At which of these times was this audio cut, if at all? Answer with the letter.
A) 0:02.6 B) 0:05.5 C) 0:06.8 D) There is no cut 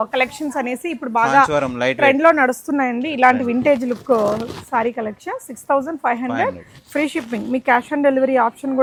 D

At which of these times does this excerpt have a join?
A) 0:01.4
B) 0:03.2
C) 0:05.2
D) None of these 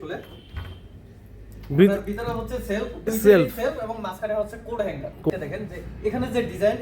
C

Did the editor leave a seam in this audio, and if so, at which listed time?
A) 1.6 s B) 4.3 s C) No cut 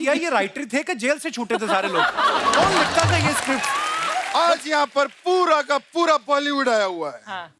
B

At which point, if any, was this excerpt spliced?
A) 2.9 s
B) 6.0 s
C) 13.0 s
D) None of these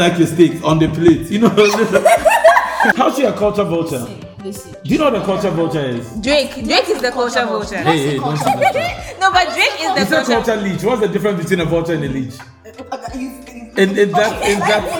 A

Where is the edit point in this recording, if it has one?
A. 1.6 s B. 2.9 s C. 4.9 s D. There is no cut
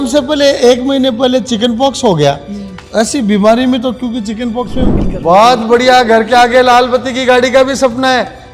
C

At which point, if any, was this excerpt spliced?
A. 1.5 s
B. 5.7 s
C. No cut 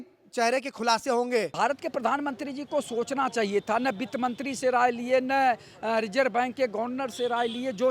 A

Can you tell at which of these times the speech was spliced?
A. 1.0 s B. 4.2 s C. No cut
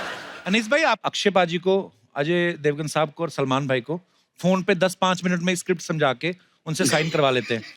A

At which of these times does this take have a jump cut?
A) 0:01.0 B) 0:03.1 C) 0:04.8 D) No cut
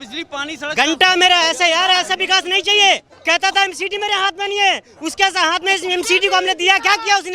B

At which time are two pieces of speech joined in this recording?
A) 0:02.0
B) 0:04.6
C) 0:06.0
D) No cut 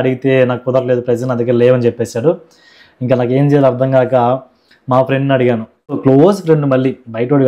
C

